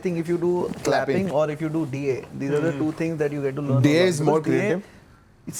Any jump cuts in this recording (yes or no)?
no